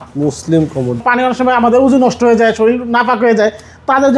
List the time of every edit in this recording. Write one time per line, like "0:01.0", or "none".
0:01.0